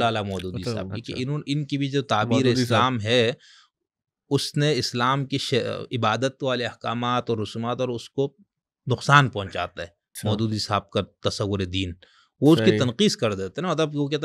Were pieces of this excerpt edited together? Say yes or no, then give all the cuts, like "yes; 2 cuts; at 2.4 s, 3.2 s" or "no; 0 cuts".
no; 0 cuts